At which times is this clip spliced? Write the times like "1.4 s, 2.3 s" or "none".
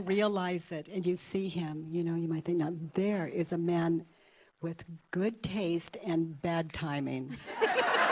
none